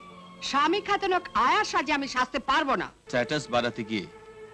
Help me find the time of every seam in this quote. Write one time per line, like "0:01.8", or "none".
0:03.0

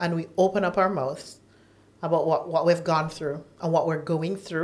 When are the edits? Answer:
none

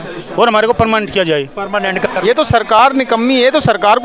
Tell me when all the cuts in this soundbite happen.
0:02.0

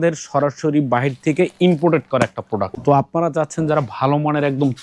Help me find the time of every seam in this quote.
0:02.7

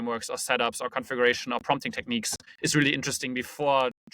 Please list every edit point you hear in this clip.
0:02.4

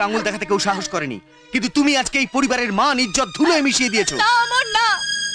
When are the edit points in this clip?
none

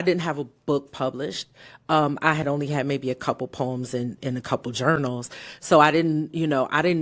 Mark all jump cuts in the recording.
none

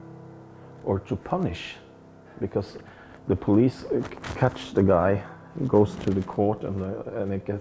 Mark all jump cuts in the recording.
none

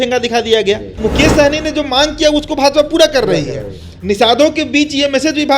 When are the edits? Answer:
0:01.0

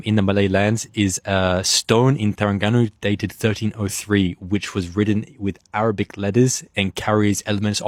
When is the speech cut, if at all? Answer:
none

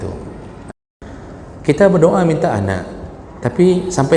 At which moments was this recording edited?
0:00.9

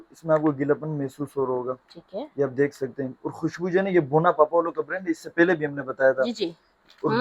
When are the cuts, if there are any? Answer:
none

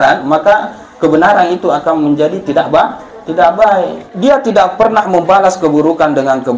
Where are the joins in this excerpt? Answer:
0:04.1

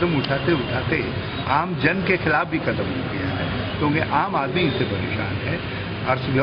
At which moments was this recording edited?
none

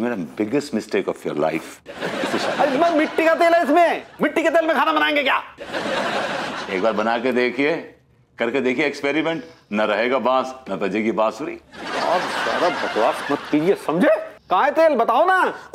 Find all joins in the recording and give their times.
0:14.3

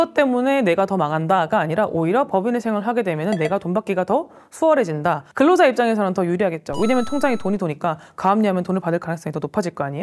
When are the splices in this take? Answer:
0:05.3

